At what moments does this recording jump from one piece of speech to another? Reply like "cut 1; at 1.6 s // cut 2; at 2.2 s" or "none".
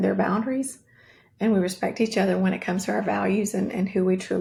none